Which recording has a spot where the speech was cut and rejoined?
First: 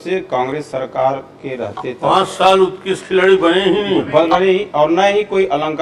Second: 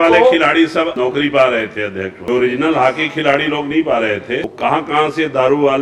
second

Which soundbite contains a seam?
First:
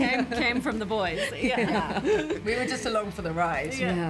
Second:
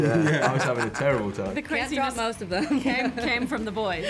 second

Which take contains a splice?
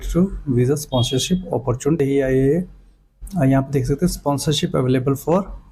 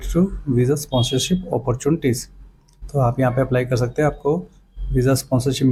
first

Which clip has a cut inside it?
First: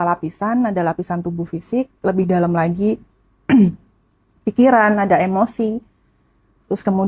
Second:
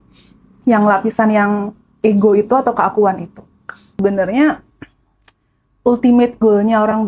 second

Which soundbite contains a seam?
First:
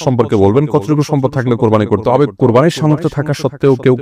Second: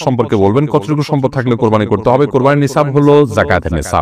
first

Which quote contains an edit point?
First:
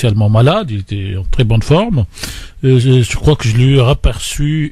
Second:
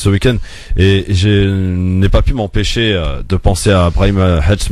first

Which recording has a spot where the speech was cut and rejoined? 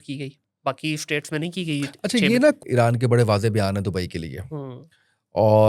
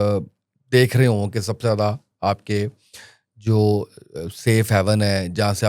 first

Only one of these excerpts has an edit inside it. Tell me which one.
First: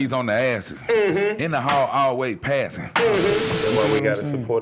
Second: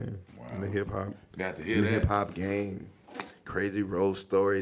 first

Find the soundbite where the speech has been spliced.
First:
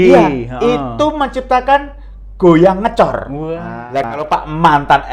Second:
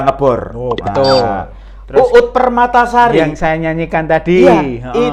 first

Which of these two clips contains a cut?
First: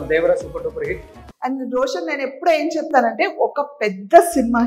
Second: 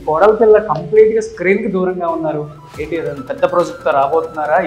first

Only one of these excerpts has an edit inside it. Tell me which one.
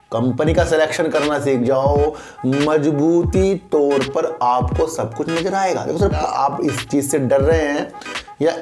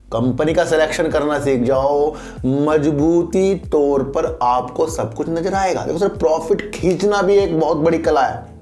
first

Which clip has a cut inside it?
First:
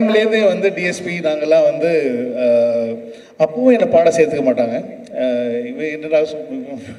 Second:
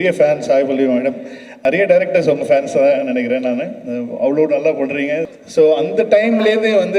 second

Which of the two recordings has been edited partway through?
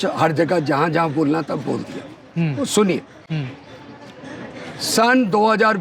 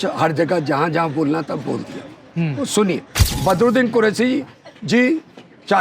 second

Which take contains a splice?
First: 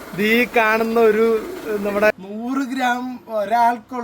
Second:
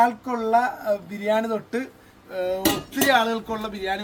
first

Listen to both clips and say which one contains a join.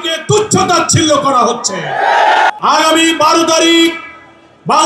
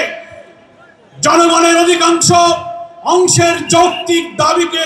first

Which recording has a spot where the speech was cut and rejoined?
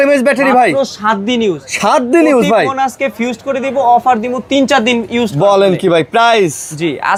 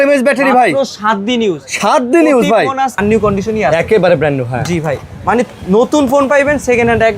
second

